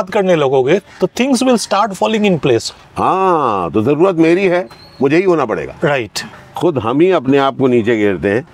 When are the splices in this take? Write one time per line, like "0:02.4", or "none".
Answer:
0:02.8
0:06.3